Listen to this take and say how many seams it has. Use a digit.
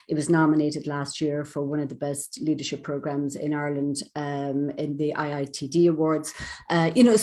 0